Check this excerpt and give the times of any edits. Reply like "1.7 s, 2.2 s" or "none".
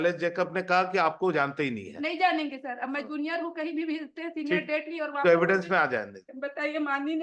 6.2 s